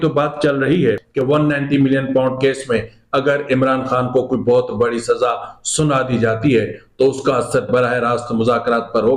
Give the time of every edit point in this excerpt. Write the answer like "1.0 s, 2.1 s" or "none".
1.1 s

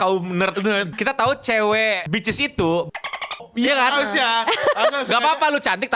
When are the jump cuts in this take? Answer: 0.9 s, 2.0 s

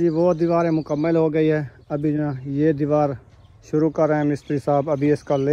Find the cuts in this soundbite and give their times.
none

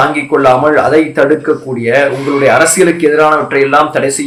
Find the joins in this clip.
none

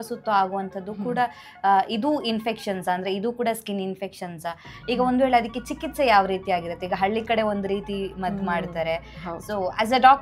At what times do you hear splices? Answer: none

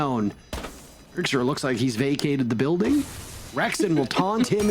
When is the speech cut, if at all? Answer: 3.4 s

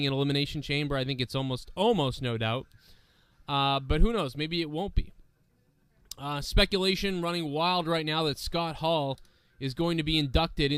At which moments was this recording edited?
none

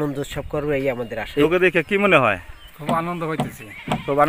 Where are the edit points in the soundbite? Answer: 1.4 s

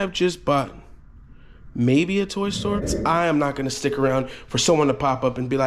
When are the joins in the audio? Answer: 2.9 s

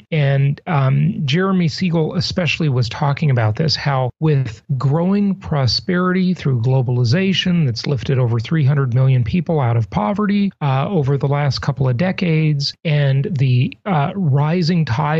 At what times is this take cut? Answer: 1.4 s

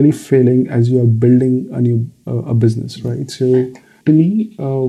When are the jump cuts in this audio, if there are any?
3.9 s

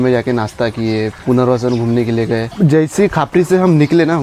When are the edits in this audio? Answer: 1.2 s, 2.5 s

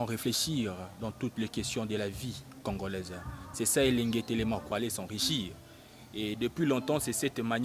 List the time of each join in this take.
4.7 s

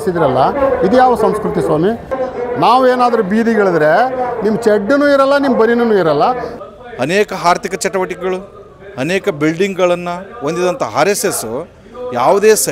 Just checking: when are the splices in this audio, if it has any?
2.1 s, 6.5 s

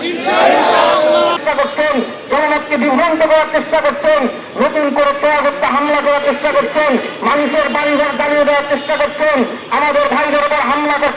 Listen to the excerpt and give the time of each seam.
1.4 s

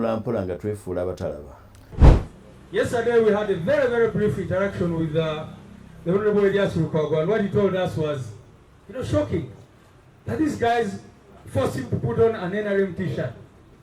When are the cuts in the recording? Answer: 2.0 s

